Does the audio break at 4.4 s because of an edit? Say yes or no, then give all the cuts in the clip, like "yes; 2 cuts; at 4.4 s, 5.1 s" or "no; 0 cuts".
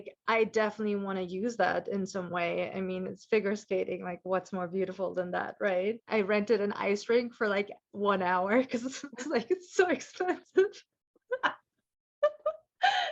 no; 1 cut; at 6.0 s